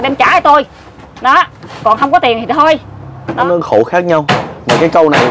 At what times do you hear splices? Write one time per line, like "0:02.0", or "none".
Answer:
0:03.4